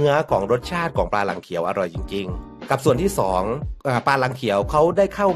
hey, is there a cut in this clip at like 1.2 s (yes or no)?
no